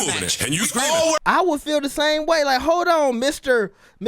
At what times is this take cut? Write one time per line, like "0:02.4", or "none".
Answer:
0:01.2